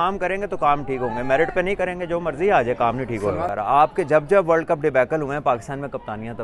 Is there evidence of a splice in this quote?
yes; 1 cut; at 3.5 s

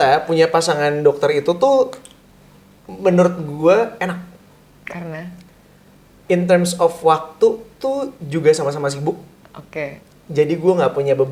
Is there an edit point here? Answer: no; 0 cuts

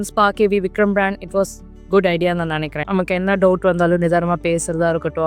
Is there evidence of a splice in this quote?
yes; 1 cut; at 2.8 s

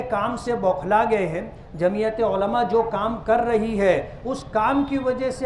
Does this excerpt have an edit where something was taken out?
no; 0 cuts

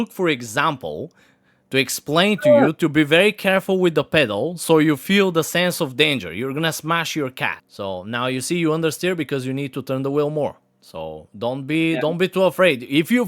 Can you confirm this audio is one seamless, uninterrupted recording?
no; 1 cut; at 7.6 s

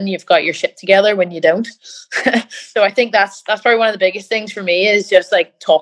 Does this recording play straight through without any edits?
yes; 0 cuts

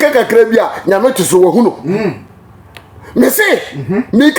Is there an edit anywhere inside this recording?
no; 0 cuts

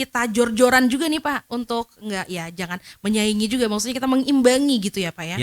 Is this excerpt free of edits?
yes; 0 cuts

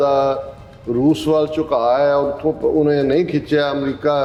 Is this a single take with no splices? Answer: yes; 0 cuts

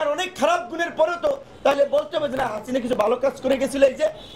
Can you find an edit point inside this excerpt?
no; 0 cuts

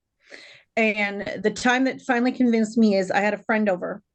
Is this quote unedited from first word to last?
yes; 0 cuts

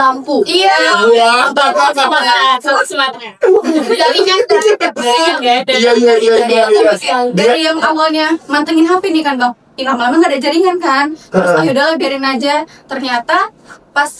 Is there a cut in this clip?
no; 0 cuts

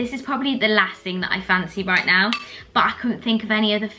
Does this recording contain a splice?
no; 0 cuts

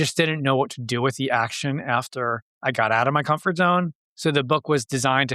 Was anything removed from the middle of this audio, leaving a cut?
yes; 2 cuts; at 2.5 s, 4.0 s

